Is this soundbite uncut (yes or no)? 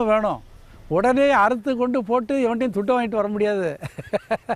yes